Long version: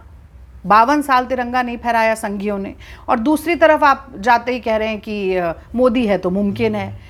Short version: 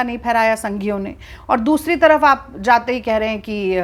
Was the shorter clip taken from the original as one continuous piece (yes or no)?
yes